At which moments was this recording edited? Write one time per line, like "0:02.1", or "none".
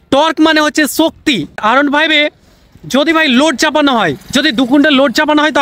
0:01.5